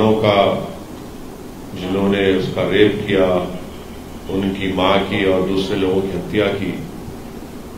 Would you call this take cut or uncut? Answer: uncut